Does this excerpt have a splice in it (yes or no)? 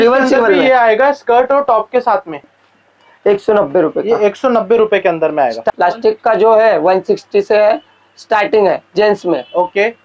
yes